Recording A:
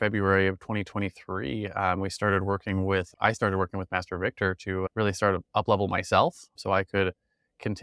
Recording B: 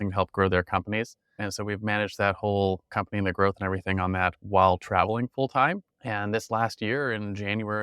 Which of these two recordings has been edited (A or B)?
B